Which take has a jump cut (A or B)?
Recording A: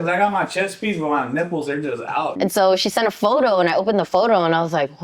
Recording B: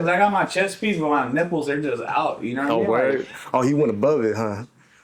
A